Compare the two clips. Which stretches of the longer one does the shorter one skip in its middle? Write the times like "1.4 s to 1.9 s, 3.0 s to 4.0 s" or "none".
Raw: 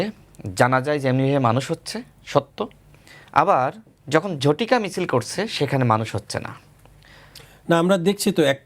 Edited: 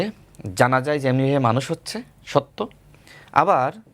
none

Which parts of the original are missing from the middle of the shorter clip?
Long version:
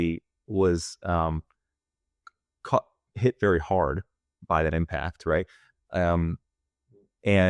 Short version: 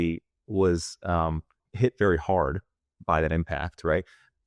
1.6 s to 3.0 s

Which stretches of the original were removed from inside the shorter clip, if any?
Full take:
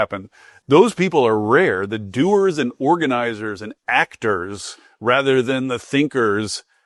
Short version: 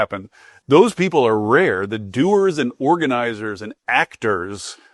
none

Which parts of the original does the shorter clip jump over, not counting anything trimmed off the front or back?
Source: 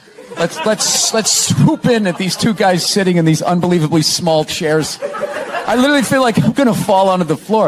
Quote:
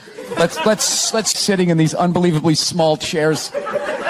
1.4 s to 2.9 s

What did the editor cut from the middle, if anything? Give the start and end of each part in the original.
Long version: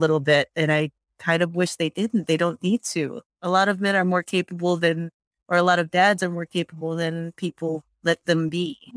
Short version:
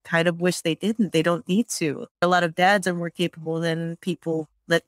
3.4 s to 5.6 s

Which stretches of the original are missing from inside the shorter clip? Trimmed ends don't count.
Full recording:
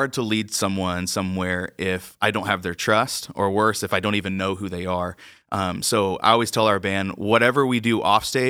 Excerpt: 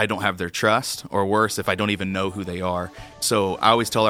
5.4 s to 5.8 s

